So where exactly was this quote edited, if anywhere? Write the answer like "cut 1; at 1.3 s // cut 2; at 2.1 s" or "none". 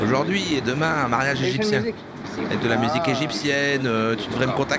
cut 1; at 2.3 s